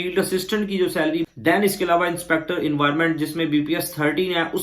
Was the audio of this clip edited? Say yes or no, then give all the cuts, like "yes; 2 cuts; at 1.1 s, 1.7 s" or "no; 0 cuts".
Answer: yes; 1 cut; at 1.2 s